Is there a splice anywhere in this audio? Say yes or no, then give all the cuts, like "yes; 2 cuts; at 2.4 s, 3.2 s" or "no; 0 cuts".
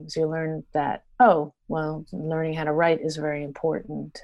no; 0 cuts